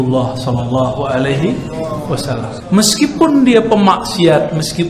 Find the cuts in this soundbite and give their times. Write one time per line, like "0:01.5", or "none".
0:02.6